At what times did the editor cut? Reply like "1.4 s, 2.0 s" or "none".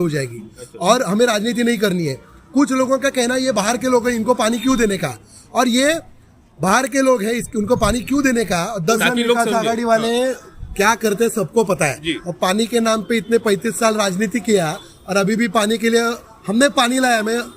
9.0 s